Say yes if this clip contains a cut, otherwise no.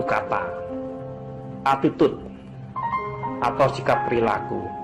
no